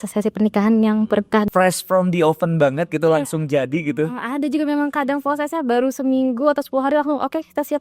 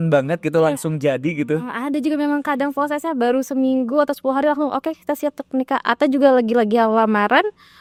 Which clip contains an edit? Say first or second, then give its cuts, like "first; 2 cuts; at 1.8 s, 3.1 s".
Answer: first; 1 cut; at 1.5 s